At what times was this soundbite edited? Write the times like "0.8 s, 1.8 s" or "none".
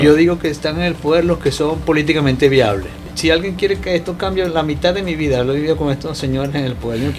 3.0 s